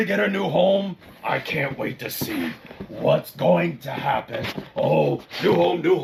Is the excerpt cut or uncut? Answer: uncut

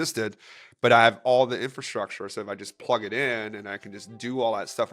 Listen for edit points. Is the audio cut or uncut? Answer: uncut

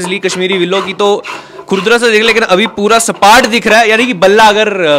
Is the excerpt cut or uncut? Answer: uncut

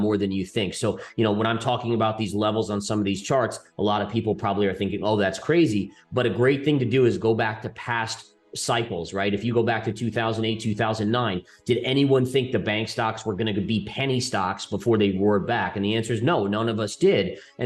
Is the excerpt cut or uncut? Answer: uncut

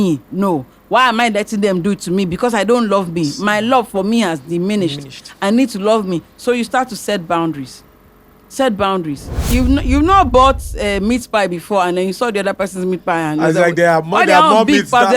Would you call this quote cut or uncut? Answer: cut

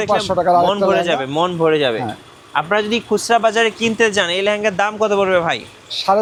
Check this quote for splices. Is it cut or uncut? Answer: uncut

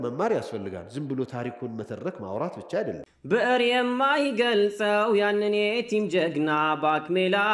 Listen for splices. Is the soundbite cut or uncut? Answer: cut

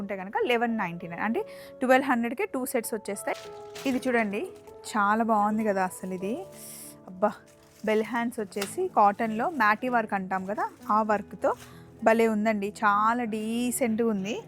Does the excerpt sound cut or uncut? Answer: cut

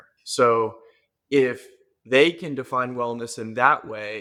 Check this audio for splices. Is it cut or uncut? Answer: uncut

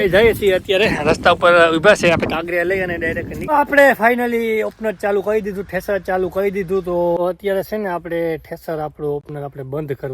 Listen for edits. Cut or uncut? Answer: cut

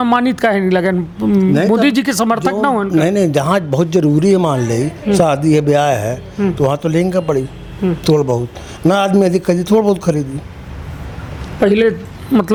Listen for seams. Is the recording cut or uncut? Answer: uncut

